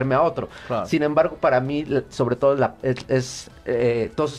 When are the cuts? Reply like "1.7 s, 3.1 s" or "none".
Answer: 3.1 s